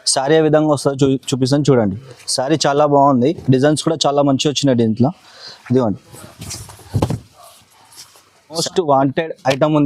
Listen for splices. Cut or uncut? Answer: cut